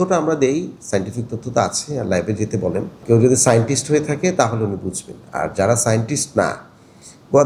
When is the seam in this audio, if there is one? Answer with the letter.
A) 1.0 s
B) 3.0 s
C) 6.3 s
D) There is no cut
B